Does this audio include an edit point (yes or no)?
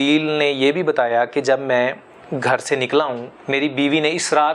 yes